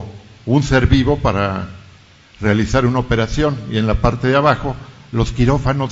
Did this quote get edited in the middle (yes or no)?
no